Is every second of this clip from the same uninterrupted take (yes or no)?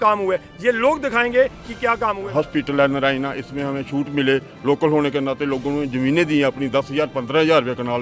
no